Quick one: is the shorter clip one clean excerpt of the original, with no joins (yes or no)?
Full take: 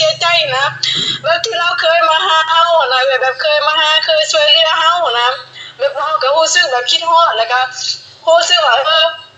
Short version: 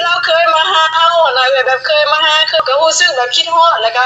no